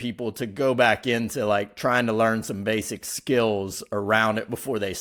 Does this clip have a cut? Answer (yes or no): no